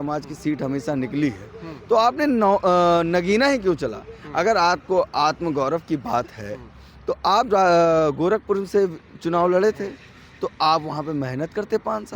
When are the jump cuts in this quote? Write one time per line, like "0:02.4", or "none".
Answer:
none